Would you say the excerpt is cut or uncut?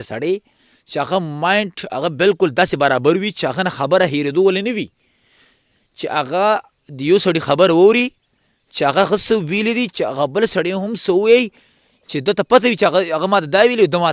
uncut